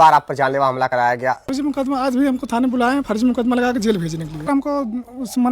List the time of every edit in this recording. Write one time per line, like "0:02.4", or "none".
0:01.5
0:04.5